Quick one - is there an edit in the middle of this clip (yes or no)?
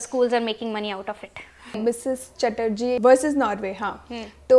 yes